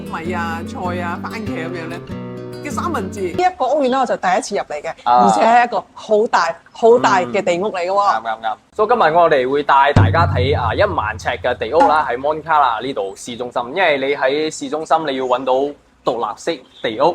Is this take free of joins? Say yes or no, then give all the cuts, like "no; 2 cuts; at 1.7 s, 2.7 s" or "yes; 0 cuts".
no; 1 cut; at 3.4 s